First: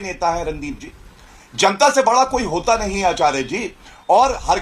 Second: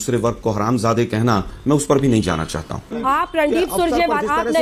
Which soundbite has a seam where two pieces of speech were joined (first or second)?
second